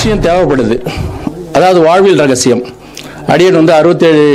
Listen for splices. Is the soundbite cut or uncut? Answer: uncut